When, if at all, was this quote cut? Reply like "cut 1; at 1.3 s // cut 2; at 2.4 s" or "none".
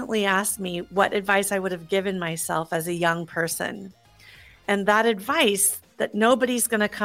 none